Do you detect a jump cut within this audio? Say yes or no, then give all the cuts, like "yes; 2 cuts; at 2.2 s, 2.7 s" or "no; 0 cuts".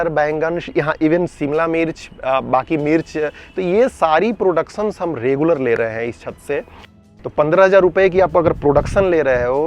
yes; 1 cut; at 7.0 s